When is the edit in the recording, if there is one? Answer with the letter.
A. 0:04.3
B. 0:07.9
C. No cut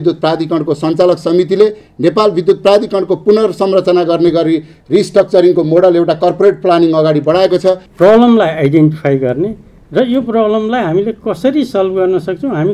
B